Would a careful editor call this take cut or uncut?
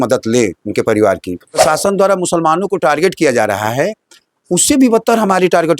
cut